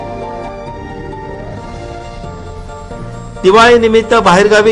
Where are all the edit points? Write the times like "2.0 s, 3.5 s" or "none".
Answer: none